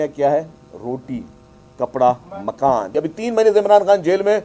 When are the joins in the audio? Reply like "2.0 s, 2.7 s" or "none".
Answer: 2.9 s

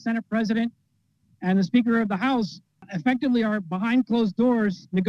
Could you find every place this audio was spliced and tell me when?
2.8 s

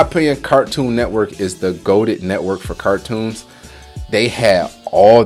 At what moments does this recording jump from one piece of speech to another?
none

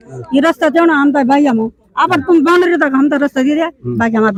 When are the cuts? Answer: none

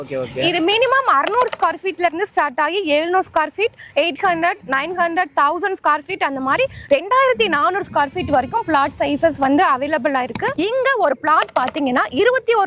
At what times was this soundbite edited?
10.4 s

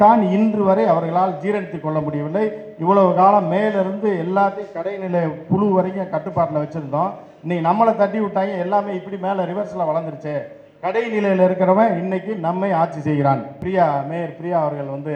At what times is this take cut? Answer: 13.6 s

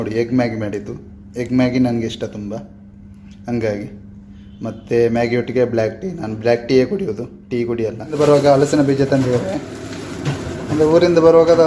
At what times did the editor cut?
8.1 s

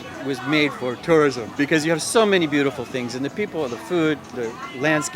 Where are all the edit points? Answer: 1.4 s

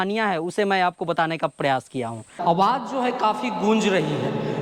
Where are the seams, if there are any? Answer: 2.3 s

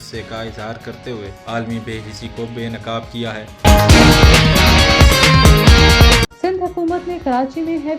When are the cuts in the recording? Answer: 3.5 s, 6.3 s

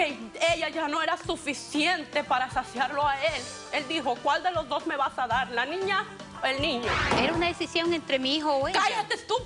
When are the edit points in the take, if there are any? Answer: 3.5 s, 7.1 s

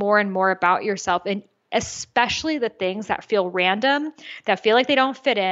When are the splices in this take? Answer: none

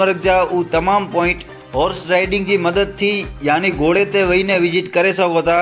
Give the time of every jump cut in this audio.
none

